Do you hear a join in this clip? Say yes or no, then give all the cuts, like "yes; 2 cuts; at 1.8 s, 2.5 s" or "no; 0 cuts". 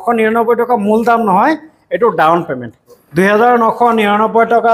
yes; 1 cut; at 2.9 s